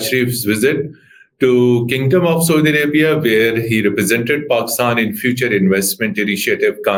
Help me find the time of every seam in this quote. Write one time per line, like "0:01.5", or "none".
none